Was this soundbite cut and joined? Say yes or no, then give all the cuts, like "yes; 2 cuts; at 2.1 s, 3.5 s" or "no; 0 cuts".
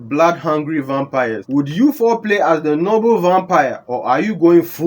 yes; 1 cut; at 1.4 s